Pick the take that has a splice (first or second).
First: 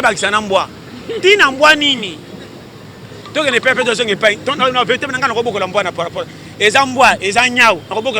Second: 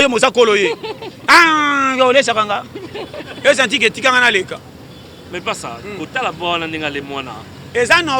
second